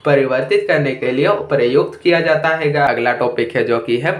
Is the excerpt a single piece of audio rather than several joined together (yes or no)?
no